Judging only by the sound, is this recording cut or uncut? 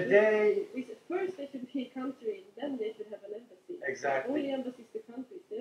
uncut